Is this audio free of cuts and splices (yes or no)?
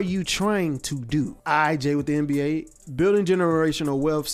no